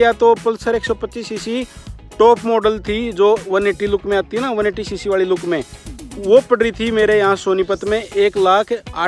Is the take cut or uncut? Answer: uncut